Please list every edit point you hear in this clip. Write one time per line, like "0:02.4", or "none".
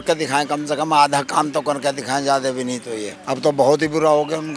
0:03.1